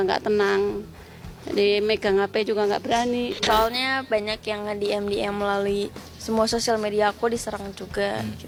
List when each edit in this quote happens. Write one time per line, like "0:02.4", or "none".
none